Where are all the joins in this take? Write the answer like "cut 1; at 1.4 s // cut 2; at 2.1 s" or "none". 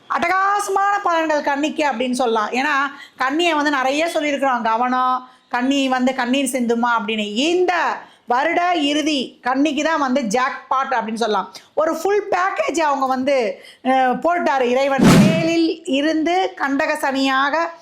cut 1; at 15.3 s